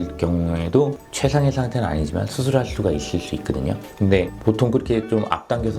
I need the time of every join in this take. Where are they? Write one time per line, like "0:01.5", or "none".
none